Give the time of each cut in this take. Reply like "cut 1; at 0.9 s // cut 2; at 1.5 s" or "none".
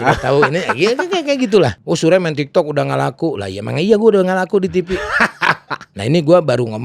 cut 1; at 1.8 s // cut 2; at 5.8 s